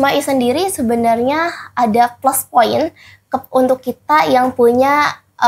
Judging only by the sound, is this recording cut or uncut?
uncut